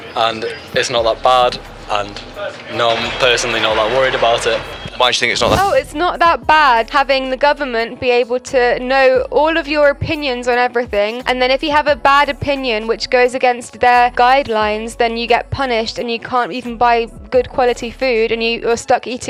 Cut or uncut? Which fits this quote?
uncut